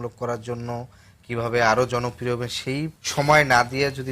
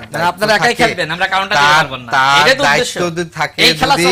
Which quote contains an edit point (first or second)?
first